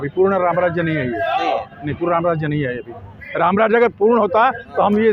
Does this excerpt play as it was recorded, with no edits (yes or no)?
yes